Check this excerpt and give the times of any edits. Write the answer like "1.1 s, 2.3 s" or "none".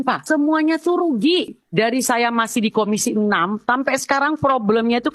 1.5 s